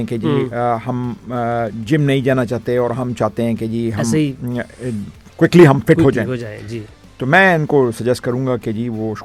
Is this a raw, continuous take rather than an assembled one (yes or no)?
yes